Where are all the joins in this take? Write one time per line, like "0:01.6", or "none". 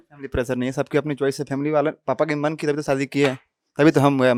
none